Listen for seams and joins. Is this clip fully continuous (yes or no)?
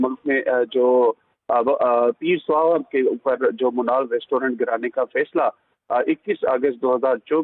no